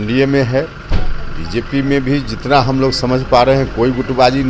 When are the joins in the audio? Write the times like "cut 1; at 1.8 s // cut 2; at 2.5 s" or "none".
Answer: none